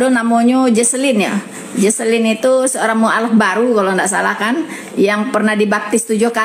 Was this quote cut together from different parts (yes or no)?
yes